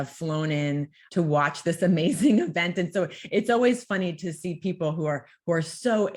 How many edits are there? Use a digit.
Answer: 1